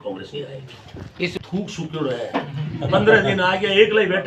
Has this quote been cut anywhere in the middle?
no; 0 cuts

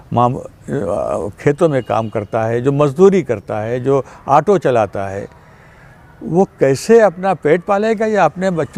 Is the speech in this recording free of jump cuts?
yes; 0 cuts

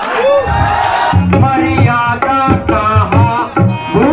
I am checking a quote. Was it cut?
yes; 1 cut; at 1.1 s

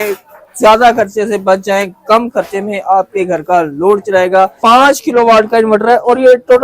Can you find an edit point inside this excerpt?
yes; 1 cut; at 4.6 s

